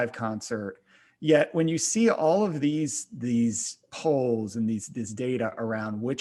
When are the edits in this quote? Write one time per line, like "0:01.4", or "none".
none